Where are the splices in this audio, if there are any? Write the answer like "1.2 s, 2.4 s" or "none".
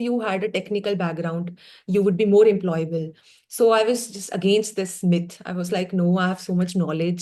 none